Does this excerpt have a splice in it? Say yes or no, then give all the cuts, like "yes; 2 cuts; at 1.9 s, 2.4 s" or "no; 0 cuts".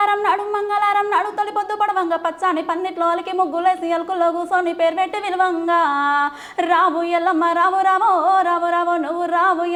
no; 0 cuts